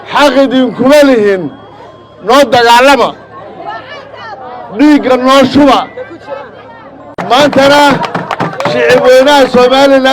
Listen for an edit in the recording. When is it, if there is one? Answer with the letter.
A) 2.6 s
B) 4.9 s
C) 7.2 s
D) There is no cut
C